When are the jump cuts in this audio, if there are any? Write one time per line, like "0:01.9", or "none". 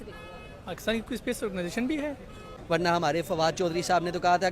0:02.5